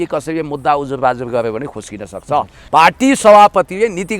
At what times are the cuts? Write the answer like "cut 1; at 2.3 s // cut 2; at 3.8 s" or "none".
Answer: cut 1; at 2.6 s